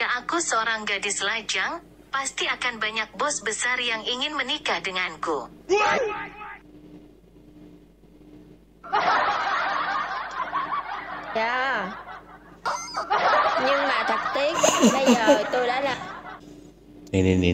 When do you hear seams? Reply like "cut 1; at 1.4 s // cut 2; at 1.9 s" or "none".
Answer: cut 1; at 16.3 s

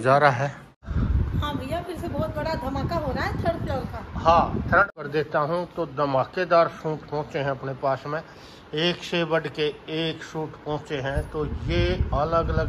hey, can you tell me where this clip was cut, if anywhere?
cut 1; at 0.9 s // cut 2; at 5.0 s

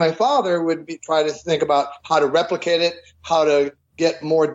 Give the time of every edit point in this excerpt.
none

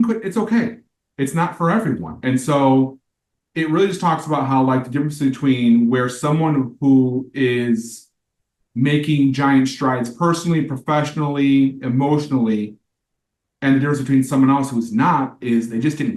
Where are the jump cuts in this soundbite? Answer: none

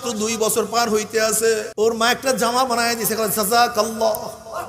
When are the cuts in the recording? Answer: cut 1; at 1.7 s

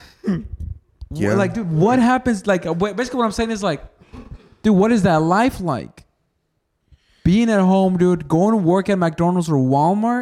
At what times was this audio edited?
none

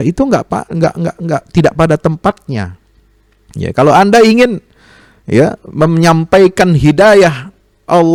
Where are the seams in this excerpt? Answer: none

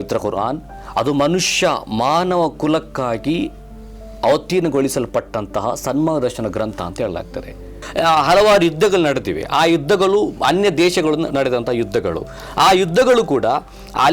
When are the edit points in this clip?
cut 1; at 7.8 s

